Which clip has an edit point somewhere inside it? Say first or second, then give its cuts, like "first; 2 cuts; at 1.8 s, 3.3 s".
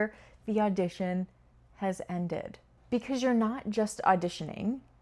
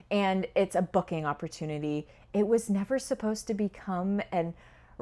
first; 1 cut; at 2.7 s